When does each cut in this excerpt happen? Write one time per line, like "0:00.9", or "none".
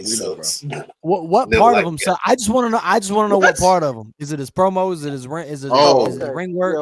none